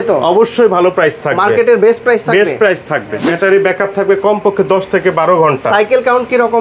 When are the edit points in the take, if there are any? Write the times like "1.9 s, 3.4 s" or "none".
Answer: 3.3 s

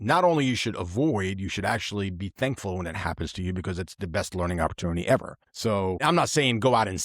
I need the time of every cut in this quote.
5.9 s

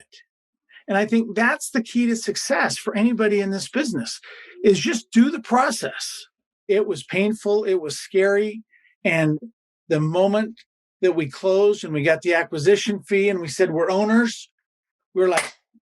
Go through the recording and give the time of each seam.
6.6 s

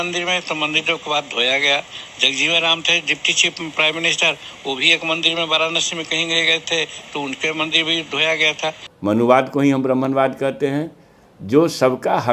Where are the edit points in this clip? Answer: 8.8 s

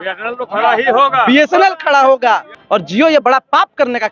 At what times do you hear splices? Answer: 2.5 s

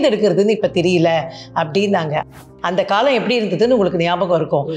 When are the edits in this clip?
2.3 s

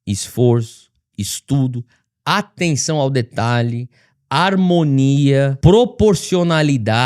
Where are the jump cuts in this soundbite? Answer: 5.5 s

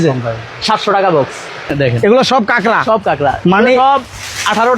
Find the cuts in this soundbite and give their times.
1.7 s

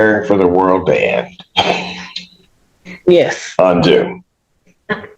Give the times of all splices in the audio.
none

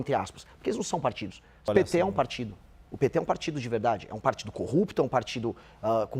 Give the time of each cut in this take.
1.7 s

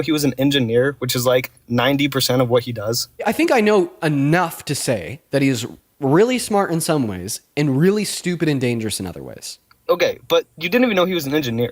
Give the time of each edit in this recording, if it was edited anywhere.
3.2 s

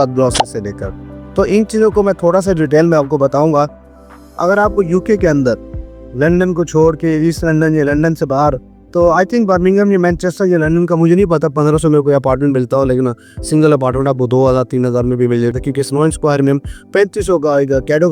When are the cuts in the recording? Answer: none

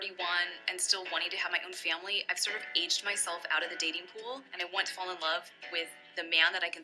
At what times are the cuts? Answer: 4.5 s

